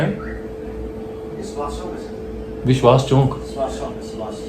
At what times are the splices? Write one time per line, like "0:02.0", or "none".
none